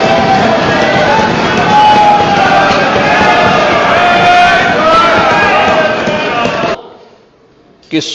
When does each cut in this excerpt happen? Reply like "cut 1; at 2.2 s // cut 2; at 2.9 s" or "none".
cut 1; at 6.8 s

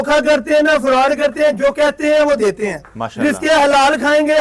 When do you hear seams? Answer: none

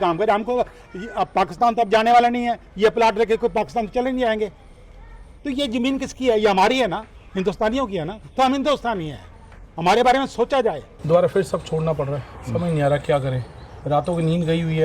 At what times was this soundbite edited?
cut 1; at 10.9 s

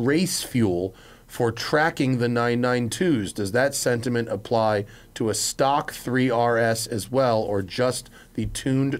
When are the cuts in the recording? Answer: none

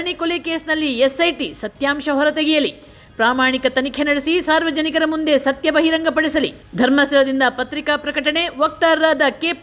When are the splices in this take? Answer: none

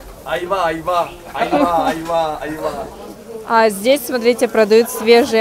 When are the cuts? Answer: cut 1; at 2.9 s

